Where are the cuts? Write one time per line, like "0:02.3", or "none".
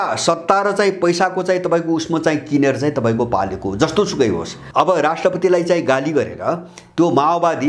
0:04.6

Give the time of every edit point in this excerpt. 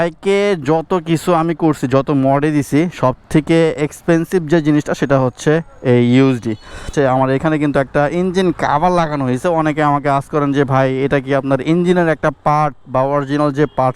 0:06.9

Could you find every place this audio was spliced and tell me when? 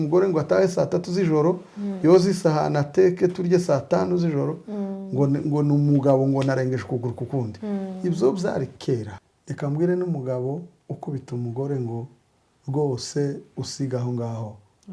0:09.2

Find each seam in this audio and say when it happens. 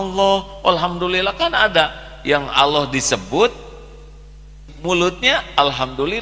0:04.7

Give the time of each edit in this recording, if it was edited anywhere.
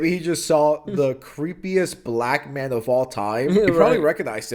none

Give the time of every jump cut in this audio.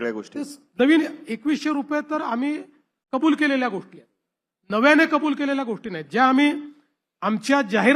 none

